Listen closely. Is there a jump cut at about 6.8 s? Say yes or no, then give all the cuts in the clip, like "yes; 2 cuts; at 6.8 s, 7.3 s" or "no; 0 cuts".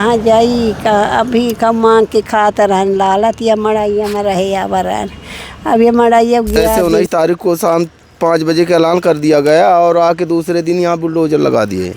yes; 1 cut; at 6.8 s